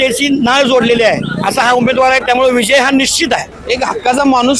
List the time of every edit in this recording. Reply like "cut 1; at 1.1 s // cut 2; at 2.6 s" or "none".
cut 1; at 3.5 s